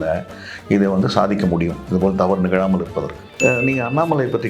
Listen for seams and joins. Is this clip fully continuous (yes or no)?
no